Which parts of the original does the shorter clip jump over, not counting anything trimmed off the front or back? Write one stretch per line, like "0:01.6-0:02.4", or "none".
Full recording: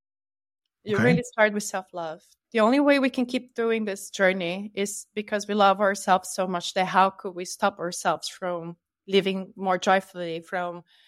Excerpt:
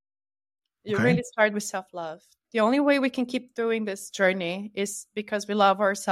none

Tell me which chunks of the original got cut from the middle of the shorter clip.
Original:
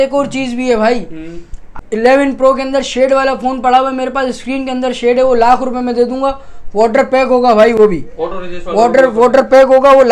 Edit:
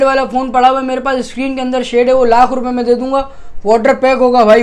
none

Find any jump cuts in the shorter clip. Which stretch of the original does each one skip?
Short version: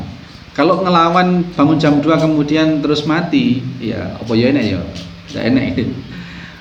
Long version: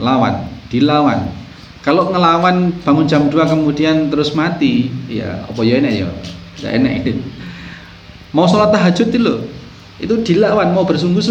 none

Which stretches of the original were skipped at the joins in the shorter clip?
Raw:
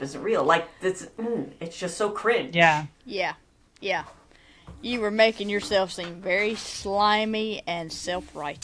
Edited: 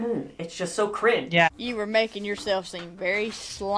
0:02.7-0:04.7

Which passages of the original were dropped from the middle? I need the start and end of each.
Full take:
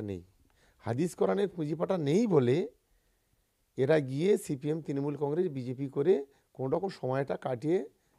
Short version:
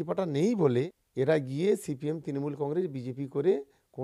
0:02.7-0:03.6

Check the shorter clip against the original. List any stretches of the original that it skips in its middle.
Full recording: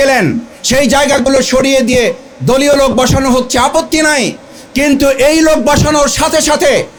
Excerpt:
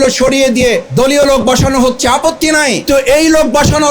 0:02.2-0:02.4
0:04.4-0:05.0

